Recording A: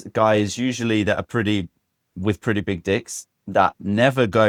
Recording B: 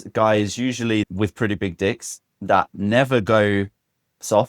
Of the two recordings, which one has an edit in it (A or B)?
B